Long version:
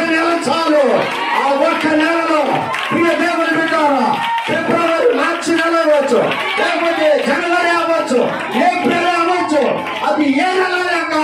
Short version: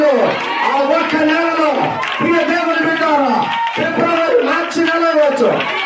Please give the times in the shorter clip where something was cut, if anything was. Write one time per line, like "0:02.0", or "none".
none